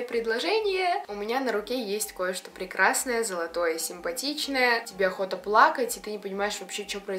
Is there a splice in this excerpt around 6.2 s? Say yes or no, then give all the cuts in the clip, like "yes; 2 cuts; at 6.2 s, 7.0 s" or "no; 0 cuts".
no; 2 cuts; at 1.0 s, 4.9 s